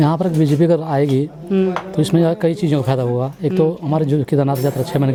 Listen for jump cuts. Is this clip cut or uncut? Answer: uncut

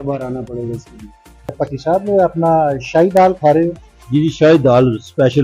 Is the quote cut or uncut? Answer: cut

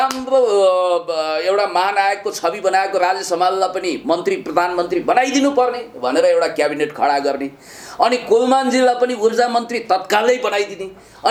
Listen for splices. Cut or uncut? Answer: uncut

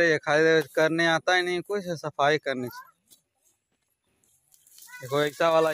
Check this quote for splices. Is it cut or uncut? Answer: uncut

